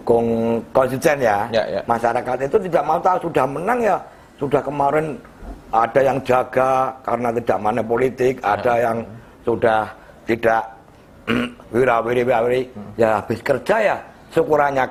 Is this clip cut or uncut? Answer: uncut